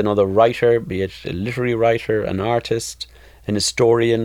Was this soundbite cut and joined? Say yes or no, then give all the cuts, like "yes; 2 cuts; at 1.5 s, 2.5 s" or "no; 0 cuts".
no; 0 cuts